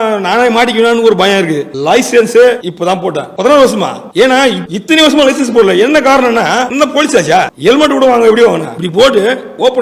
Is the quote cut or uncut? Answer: cut